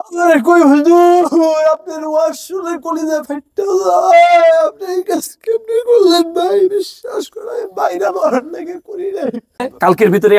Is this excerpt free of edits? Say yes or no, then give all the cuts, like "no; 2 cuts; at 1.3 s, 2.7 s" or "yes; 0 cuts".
no; 1 cut; at 9.5 s